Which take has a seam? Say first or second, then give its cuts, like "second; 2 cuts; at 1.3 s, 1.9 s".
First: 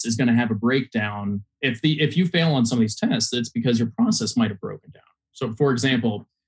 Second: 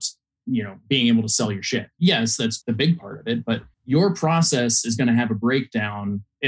second; 3 cuts; at 1.9 s, 2.6 s, 3.7 s